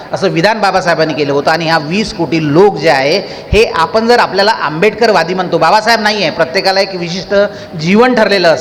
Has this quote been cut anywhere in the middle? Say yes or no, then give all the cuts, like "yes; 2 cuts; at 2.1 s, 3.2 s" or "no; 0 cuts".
no; 0 cuts